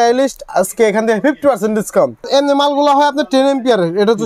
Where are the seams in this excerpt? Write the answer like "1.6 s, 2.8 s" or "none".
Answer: 2.3 s